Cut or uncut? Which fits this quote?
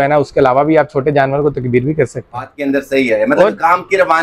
cut